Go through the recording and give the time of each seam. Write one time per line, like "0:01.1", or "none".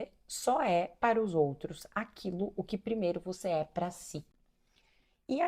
none